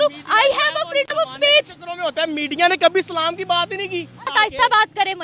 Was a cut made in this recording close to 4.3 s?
yes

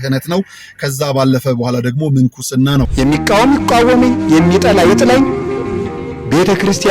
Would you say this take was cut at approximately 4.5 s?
no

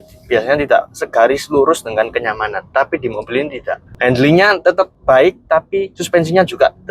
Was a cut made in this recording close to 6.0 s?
yes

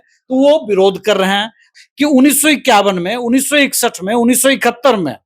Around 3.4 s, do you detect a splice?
no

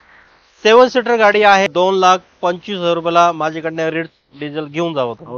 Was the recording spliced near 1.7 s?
yes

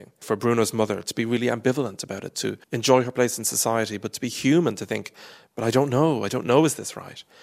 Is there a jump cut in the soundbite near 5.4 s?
no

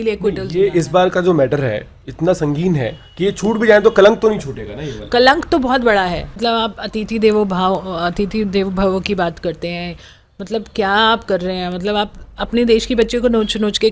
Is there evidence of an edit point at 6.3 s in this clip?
yes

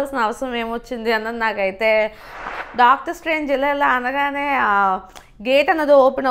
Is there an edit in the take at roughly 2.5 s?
yes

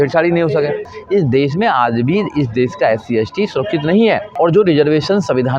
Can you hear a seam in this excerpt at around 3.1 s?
no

